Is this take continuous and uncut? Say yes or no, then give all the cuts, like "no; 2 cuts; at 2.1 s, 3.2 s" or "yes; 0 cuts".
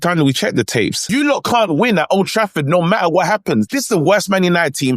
no; 2 cuts; at 1.0 s, 3.7 s